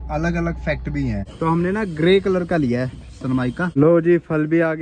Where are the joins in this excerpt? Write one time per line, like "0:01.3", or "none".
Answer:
0:01.3
0:03.7